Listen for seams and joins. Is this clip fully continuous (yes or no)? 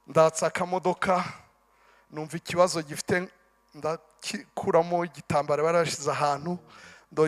yes